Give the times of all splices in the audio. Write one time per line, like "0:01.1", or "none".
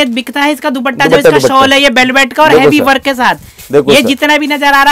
none